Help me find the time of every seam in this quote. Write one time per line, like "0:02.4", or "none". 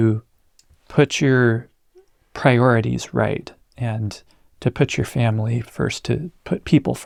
none